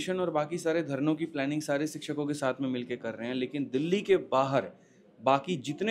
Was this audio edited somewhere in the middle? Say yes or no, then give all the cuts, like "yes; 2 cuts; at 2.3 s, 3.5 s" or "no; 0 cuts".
no; 0 cuts